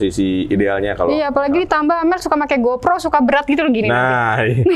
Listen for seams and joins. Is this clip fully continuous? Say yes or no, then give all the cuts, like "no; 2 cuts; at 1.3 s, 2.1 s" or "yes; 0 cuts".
yes; 0 cuts